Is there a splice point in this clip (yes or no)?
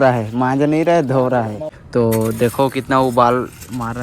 yes